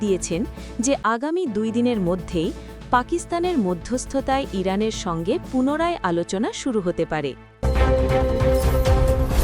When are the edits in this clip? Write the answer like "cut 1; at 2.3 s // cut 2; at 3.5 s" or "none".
cut 1; at 7.5 s

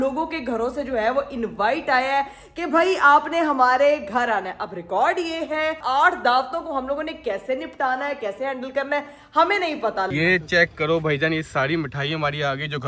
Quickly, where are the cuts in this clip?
cut 1; at 5.8 s // cut 2; at 10.1 s

